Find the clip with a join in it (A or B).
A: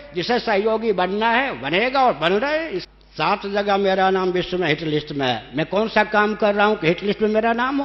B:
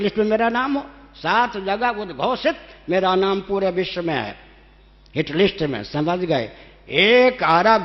A